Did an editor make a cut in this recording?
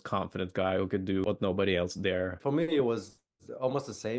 yes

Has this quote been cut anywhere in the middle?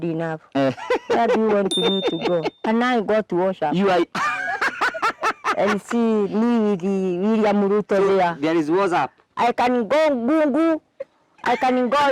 yes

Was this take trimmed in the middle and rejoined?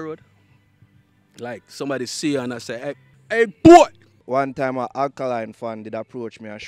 yes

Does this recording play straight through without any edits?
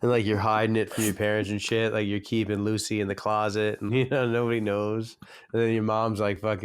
no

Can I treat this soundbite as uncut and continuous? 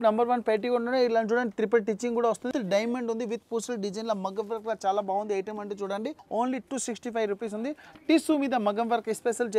no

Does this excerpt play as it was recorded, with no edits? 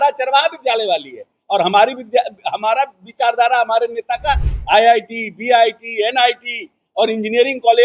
yes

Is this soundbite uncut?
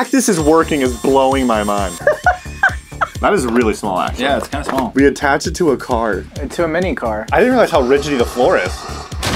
no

